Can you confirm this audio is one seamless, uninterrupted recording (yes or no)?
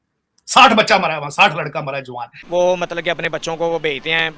no